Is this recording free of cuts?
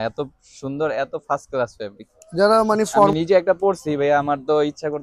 no; 1 cut; at 3.1 s

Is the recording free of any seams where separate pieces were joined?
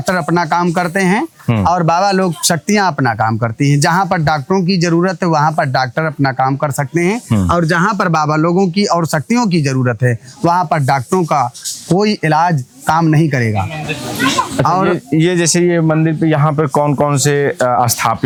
yes; 0 cuts

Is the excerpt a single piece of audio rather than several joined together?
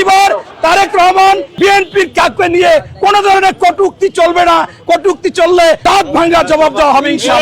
no; 2 cuts; at 1.5 s, 5.8 s

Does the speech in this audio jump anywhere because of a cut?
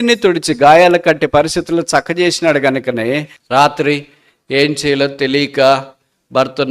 yes; 1 cut; at 3.3 s

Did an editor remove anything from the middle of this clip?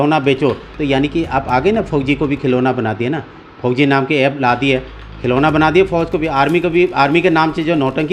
no; 0 cuts

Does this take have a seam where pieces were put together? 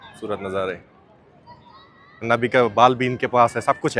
yes; 1 cut; at 2.3 s

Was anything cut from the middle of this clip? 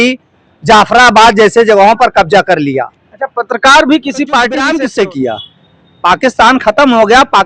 yes; 1 cut; at 4.7 s

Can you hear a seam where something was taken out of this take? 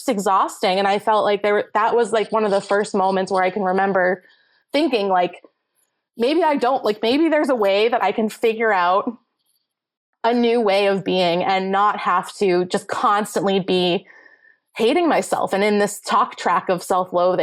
no; 0 cuts

